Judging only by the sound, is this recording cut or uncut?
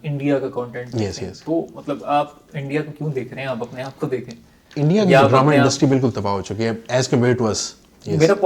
uncut